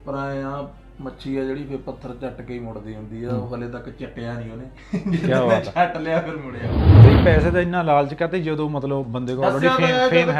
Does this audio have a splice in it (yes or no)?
yes